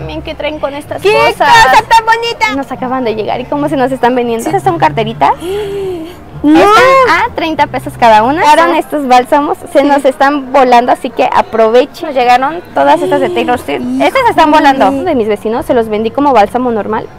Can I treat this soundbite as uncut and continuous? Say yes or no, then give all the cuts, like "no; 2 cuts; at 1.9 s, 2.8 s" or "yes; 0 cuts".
no; 5 cuts; at 2.5 s, 4.5 s, 8.5 s, 12.0 s, 15.1 s